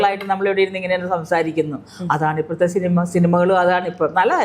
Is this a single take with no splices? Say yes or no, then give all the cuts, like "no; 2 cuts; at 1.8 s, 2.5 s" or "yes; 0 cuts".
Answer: yes; 0 cuts